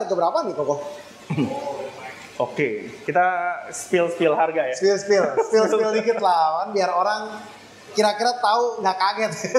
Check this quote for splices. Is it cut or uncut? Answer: uncut